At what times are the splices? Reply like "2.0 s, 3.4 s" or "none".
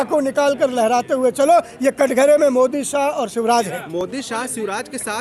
none